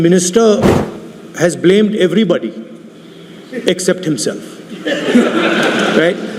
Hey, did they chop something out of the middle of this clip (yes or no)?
no